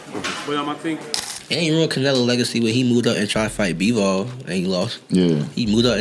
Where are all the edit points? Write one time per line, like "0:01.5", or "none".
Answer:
0:01.1

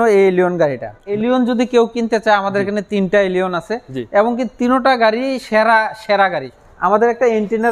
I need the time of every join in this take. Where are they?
0:01.1
0:06.5

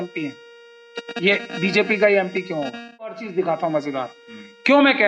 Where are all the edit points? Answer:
0:03.2

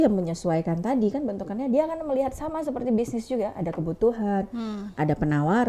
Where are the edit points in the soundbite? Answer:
none

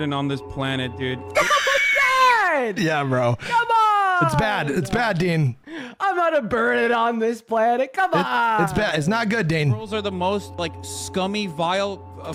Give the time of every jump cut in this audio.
none

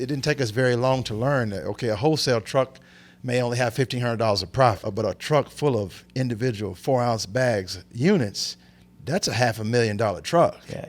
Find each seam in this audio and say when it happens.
0:04.9

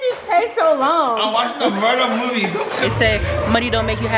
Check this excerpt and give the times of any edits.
0:02.9

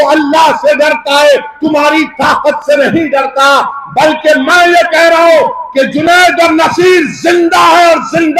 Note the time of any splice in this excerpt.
none

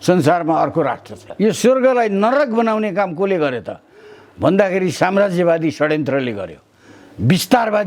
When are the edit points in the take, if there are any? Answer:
0:01.3

